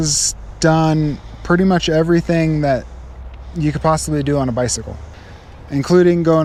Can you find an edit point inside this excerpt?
no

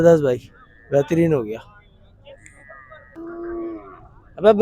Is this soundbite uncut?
no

